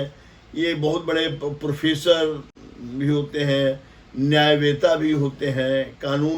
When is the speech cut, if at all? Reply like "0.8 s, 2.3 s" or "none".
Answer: none